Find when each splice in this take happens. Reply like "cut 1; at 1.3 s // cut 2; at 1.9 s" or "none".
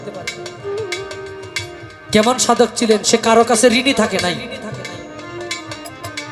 none